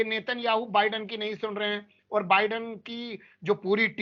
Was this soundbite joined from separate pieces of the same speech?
no; 0 cuts

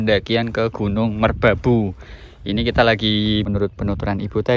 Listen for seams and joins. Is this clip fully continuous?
no; 1 cut; at 3.5 s

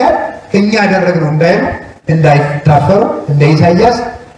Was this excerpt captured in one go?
yes; 0 cuts

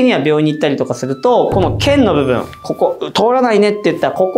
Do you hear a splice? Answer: no; 0 cuts

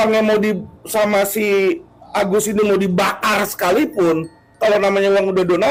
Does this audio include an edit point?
no; 0 cuts

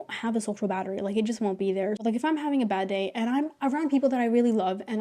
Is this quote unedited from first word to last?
yes; 0 cuts

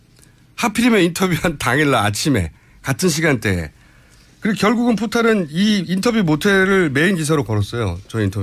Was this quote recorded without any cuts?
no; 1 cut; at 0.9 s

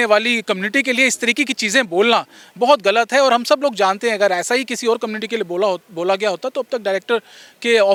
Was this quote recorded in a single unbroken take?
yes; 0 cuts

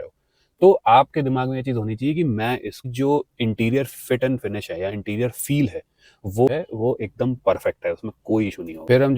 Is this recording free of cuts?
no; 2 cuts; at 2.9 s, 6.5 s

